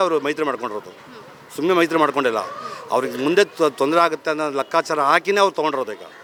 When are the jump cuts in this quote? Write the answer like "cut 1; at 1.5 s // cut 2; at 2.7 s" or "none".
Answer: none